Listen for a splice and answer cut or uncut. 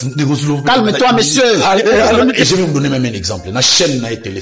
cut